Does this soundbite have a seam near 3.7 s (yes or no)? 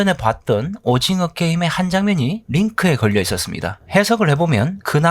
yes